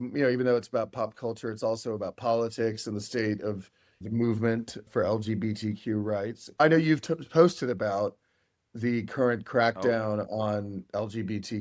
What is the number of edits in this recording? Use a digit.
3